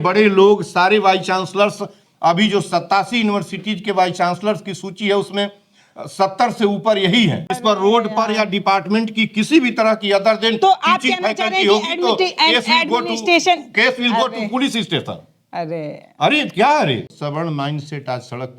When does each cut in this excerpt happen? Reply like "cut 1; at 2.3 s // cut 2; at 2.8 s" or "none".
cut 1; at 7.6 s // cut 2; at 17.1 s

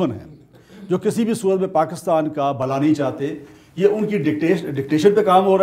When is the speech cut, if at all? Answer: none

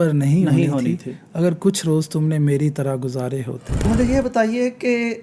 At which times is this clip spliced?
cut 1; at 3.9 s

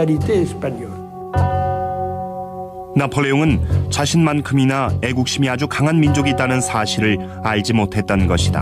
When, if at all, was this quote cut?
none

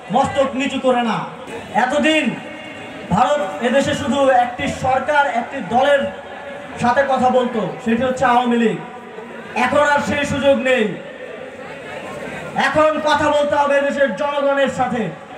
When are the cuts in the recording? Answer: none

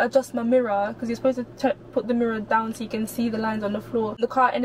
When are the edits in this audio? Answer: none

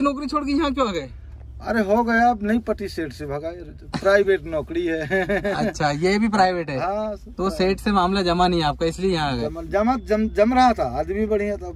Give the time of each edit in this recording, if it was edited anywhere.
none

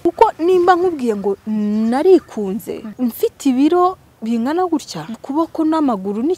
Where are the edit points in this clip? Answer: cut 1; at 2.9 s // cut 2; at 5.2 s

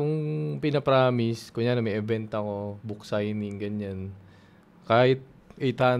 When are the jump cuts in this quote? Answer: none

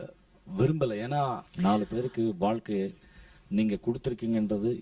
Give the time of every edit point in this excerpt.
cut 1; at 1.5 s

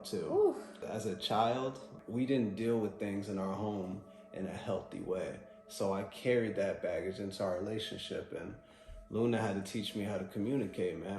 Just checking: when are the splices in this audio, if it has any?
cut 1; at 0.8 s // cut 2; at 1.9 s

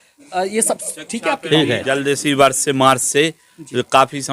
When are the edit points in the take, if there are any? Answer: cut 1; at 2.0 s

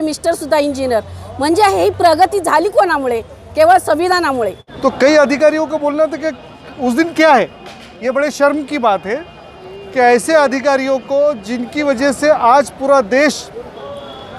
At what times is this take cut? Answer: cut 1; at 4.6 s

